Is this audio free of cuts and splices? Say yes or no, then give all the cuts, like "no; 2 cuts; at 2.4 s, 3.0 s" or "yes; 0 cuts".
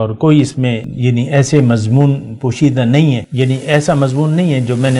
no; 2 cuts; at 0.9 s, 3.3 s